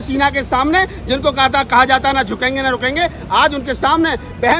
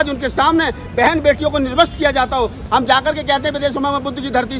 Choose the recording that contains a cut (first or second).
second